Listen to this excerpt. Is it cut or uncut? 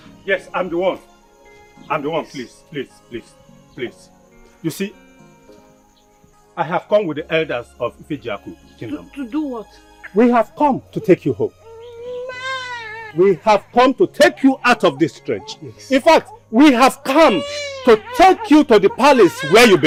uncut